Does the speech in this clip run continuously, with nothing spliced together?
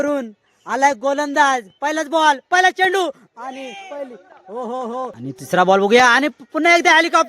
no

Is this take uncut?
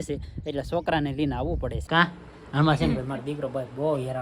no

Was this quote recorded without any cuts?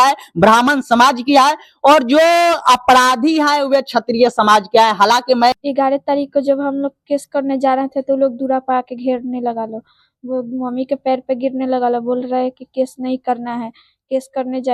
no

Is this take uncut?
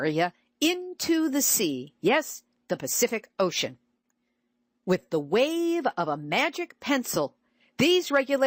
yes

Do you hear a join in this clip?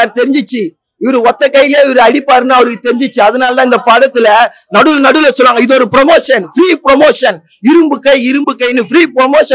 no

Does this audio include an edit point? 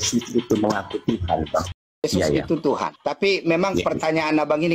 yes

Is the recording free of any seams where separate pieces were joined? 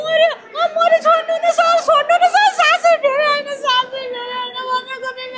yes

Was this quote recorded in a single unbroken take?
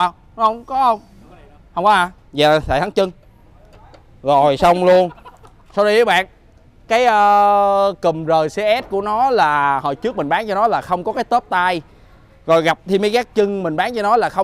yes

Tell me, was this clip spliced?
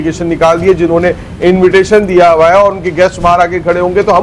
no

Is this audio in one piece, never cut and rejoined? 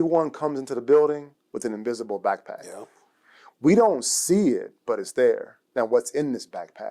yes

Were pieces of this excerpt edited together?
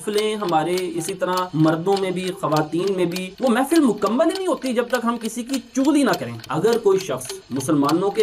yes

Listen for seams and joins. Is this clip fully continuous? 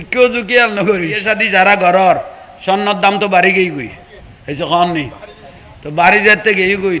no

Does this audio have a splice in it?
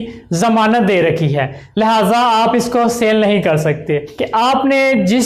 yes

